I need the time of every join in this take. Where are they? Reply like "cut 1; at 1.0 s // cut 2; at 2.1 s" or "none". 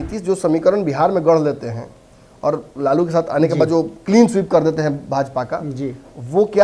none